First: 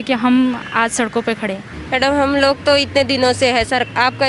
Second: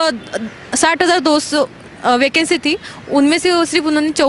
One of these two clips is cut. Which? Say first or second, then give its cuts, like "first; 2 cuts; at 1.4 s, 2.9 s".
first; 1 cut; at 1.7 s